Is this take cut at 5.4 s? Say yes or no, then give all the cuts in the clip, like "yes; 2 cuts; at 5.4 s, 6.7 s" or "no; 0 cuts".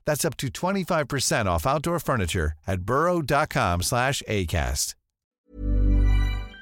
yes; 1 cut; at 5.4 s